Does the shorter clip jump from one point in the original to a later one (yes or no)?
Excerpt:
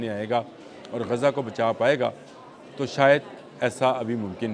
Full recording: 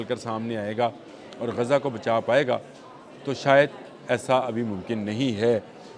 no